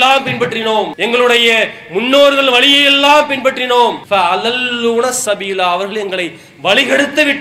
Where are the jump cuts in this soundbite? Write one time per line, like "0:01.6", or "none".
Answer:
0:00.9
0:04.0